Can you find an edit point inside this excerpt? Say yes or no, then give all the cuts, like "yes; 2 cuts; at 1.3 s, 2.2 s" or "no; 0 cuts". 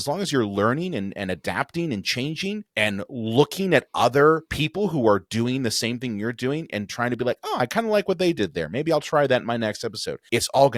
no; 0 cuts